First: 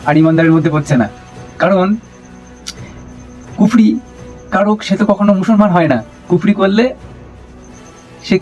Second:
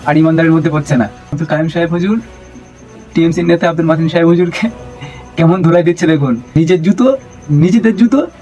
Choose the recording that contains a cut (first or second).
second